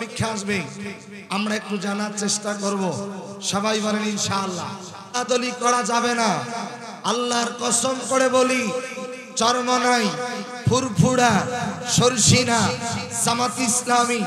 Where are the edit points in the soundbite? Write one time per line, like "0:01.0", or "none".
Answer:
0:05.2